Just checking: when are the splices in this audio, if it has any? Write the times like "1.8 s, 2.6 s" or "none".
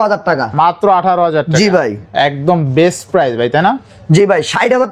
none